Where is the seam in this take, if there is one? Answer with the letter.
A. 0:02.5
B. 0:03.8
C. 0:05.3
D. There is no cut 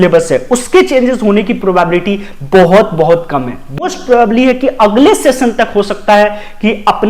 B